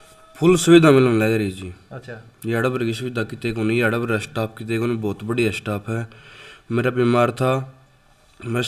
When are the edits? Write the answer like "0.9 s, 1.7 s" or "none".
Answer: none